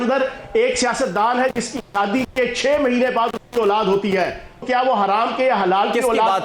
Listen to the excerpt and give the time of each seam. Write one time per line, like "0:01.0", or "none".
0:04.6